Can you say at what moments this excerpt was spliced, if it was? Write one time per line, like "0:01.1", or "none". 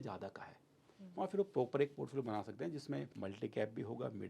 0:03.1